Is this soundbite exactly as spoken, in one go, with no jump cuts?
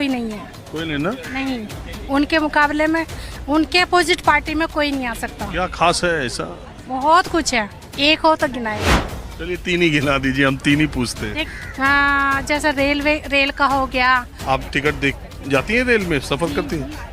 no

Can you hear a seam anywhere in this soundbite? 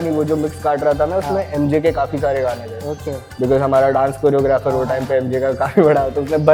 no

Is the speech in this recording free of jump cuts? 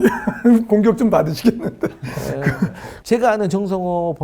no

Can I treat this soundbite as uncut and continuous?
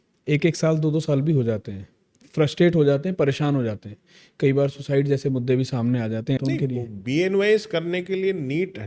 no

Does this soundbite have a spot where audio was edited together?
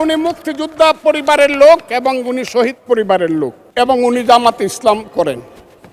yes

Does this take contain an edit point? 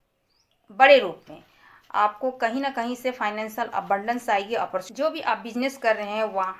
yes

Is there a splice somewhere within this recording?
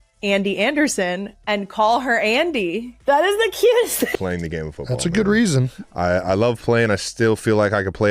yes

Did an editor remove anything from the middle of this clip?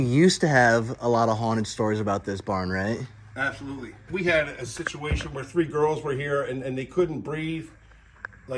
yes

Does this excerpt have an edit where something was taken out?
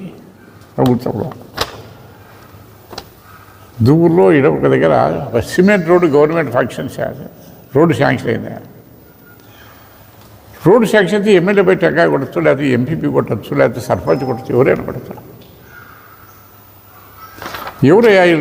no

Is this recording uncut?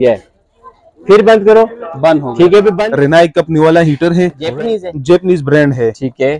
no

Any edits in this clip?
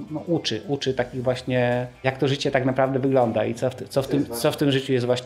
yes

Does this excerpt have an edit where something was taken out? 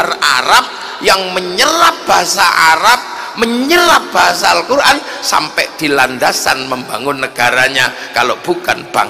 no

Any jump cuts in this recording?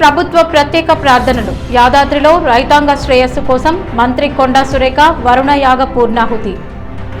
no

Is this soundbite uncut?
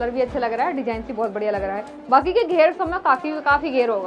yes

